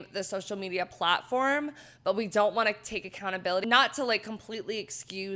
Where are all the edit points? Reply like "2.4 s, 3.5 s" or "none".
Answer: 3.6 s